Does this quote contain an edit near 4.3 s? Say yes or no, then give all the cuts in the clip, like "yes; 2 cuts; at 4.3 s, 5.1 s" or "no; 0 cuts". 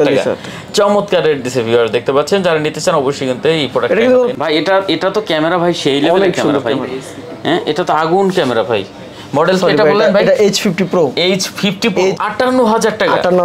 yes; 2 cuts; at 4.3 s, 12.2 s